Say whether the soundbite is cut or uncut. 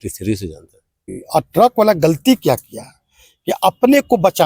cut